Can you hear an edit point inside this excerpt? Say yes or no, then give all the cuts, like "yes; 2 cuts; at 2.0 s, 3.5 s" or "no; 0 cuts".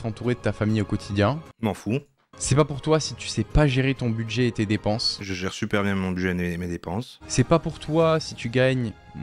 no; 0 cuts